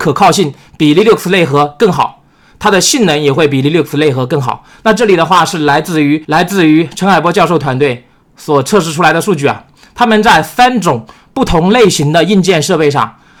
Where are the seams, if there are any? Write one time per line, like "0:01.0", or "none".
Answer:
none